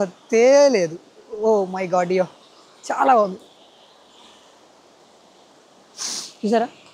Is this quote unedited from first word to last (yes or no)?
yes